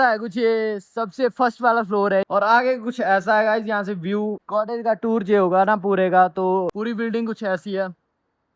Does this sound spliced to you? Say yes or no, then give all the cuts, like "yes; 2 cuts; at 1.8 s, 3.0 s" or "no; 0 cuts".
yes; 3 cuts; at 2.2 s, 4.4 s, 6.7 s